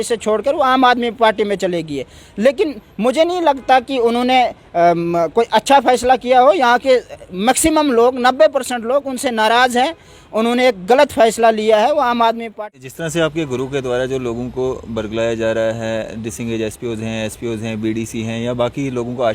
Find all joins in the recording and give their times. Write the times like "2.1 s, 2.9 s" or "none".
12.5 s